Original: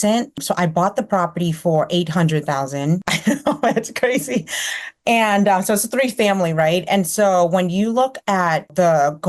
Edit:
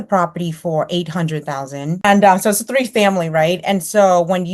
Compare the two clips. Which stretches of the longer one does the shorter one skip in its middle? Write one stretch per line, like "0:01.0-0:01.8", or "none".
0:03.0-0:05.3